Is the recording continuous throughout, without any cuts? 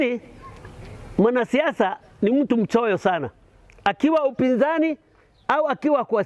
yes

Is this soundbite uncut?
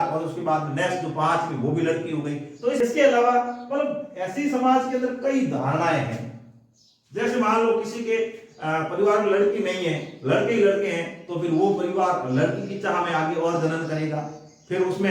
no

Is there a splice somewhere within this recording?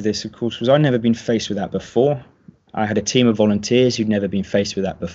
no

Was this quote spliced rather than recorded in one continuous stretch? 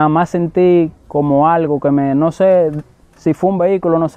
no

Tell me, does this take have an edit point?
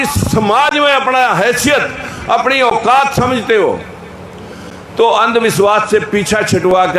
no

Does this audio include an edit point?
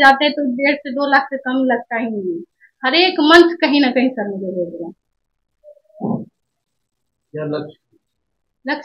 no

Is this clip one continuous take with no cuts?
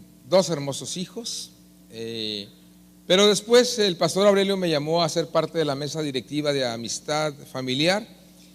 no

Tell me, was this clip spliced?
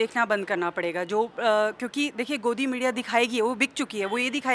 no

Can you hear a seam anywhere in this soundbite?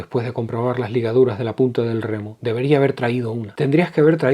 yes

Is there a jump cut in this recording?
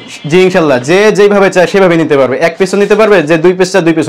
no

